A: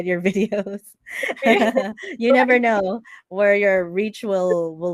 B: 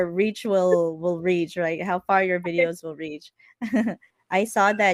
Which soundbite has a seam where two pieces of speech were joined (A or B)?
B